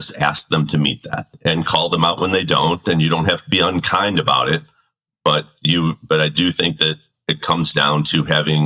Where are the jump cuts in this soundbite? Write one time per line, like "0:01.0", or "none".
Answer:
0:01.3